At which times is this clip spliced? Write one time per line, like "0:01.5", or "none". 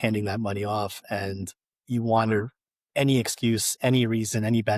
none